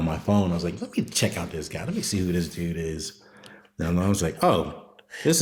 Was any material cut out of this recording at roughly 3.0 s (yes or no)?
no